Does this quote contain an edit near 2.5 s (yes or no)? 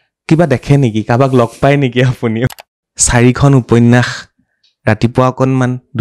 yes